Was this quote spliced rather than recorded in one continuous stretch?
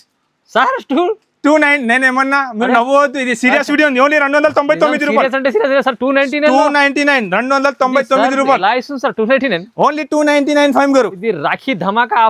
no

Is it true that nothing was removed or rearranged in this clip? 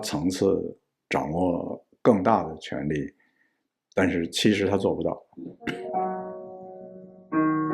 no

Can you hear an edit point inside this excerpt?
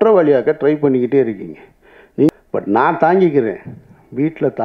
yes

